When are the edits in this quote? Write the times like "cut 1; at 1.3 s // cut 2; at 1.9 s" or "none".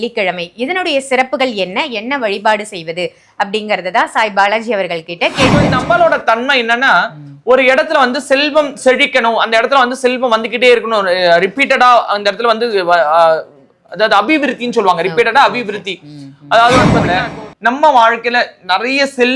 cut 1; at 5.7 s // cut 2; at 17.0 s